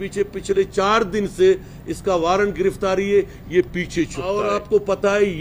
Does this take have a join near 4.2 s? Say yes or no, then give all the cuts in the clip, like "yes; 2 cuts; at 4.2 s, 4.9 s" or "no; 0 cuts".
yes; 1 cut; at 4.2 s